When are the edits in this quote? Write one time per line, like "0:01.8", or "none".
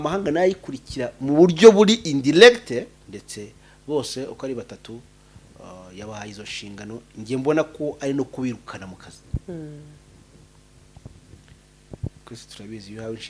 0:03.0